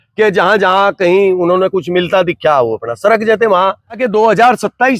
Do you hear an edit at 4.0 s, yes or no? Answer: yes